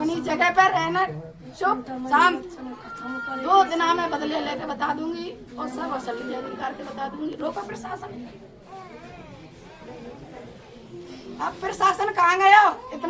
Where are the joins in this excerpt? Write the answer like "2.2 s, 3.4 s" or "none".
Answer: none